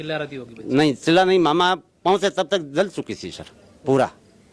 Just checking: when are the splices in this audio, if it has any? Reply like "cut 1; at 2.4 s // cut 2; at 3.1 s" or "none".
none